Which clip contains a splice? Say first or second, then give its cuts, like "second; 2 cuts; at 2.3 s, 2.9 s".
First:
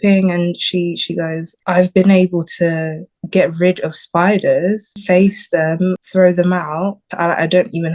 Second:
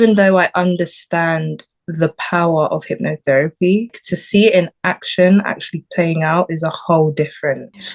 first; 4 cuts; at 1.5 s, 4.9 s, 6.0 s, 7.0 s